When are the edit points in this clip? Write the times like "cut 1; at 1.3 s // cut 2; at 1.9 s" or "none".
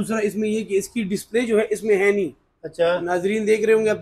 none